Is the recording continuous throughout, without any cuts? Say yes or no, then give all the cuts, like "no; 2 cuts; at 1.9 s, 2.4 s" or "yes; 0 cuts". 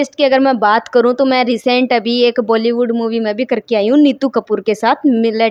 yes; 0 cuts